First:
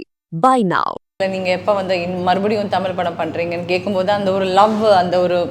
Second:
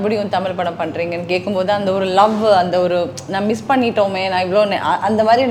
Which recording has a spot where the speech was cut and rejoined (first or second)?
first